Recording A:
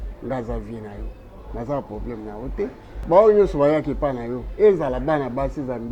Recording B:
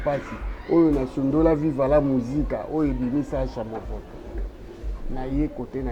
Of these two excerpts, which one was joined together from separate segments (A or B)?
A